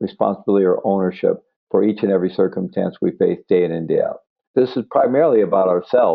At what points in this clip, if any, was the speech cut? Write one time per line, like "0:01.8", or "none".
0:04.5